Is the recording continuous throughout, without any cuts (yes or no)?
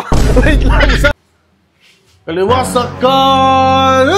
no